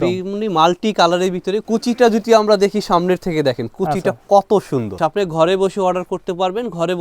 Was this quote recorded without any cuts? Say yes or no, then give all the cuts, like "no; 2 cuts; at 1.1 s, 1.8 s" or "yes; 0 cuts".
no; 2 cuts; at 1.6 s, 5.0 s